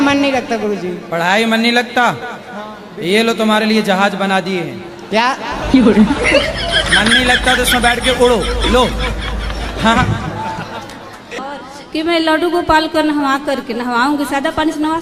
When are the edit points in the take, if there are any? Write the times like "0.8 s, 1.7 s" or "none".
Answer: 11.4 s